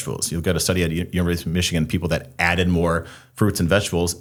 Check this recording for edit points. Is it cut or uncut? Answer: uncut